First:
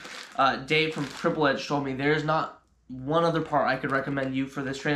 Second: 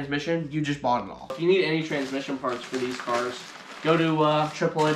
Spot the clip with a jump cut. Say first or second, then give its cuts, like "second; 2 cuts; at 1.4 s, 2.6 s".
second; 1 cut; at 1.4 s